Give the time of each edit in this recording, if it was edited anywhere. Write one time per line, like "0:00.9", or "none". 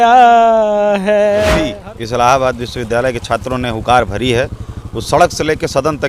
0:01.7